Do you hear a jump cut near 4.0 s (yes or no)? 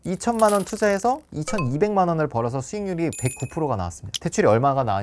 yes